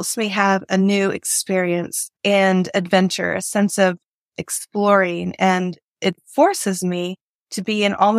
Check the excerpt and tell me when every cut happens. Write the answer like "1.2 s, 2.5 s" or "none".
2.0 s